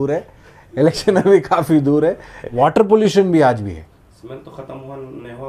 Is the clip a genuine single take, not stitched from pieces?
no; 1 cut; at 2.5 s

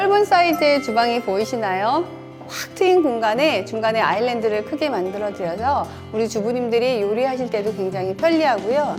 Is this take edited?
no; 0 cuts

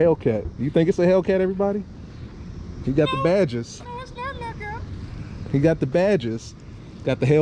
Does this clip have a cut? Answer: no; 0 cuts

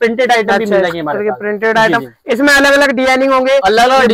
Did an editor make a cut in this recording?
no; 0 cuts

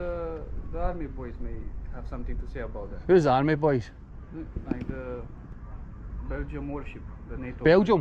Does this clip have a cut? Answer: no; 0 cuts

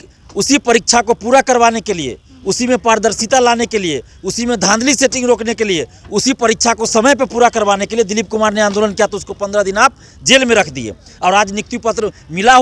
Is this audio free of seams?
yes; 0 cuts

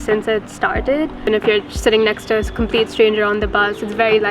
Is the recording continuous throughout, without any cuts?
no; 1 cut; at 1.3 s

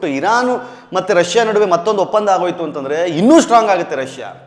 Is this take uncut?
yes; 0 cuts

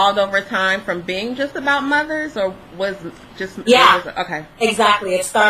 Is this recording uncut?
no; 1 cut; at 3.7 s

